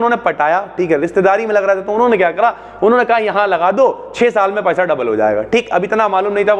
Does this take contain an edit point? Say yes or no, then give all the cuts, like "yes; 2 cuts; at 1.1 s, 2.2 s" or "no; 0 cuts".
no; 0 cuts